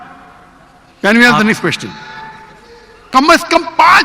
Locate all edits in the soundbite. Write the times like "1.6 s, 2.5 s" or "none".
3.1 s